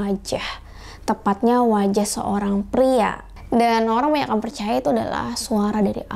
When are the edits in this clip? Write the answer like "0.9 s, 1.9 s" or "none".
3.3 s